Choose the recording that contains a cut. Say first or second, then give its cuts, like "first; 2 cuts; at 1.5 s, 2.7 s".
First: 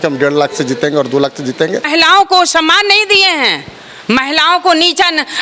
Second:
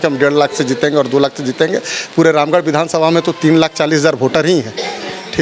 first; 1 cut; at 1.9 s